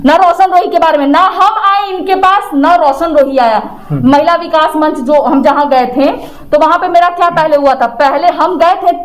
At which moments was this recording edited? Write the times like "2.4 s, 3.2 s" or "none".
none